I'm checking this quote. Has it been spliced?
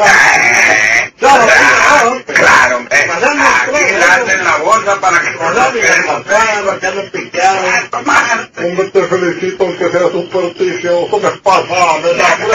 yes; 1 cut; at 10.5 s

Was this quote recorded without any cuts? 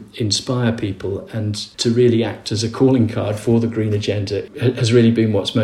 yes; 0 cuts

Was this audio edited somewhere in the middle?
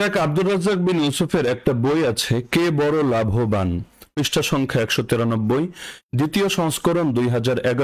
no; 0 cuts

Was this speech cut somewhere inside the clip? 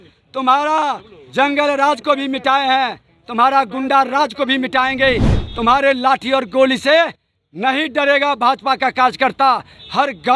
no; 0 cuts

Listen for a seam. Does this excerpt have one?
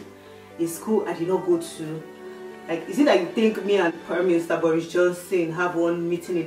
no; 0 cuts

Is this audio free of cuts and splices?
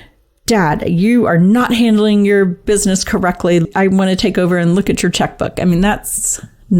no; 1 cut; at 3.7 s

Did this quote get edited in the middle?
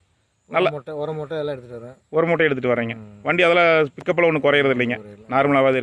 no; 0 cuts

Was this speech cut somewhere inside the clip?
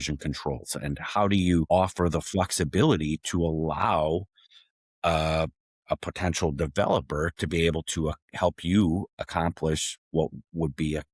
yes; 1 cut; at 1.7 s

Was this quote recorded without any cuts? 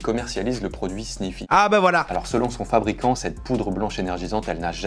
no; 2 cuts; at 1.4 s, 2.1 s

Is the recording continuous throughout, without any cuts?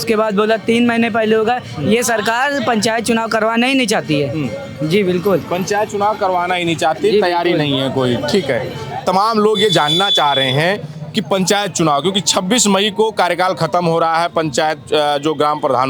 yes; 0 cuts

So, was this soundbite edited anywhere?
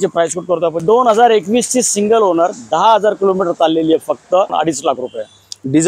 yes; 2 cuts; at 0.8 s, 4.5 s

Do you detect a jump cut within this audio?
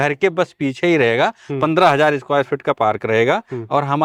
no; 0 cuts

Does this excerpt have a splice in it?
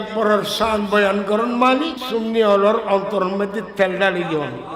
yes; 1 cut; at 2.0 s

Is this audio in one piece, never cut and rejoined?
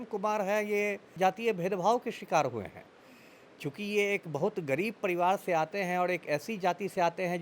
no; 1 cut; at 1.1 s

